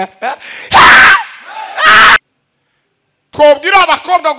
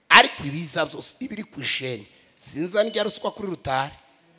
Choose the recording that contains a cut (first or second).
first